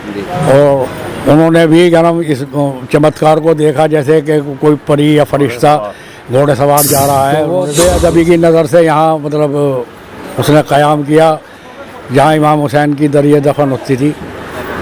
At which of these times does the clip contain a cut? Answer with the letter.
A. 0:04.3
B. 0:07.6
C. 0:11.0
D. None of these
B